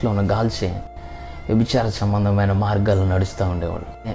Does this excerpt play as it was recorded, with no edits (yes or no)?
yes